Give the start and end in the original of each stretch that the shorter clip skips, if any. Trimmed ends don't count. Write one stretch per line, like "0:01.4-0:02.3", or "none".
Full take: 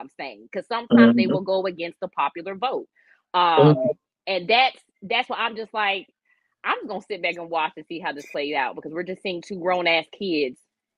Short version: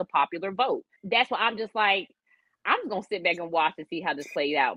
0:03.0-0:04.9